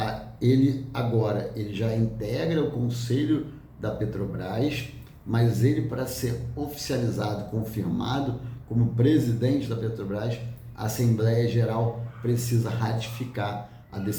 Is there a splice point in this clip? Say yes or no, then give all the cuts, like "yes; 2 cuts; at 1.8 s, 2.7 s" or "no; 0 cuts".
no; 0 cuts